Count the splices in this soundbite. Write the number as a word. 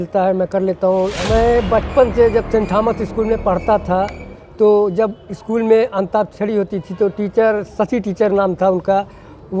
one